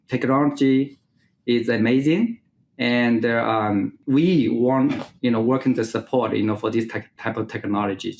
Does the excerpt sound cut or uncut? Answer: cut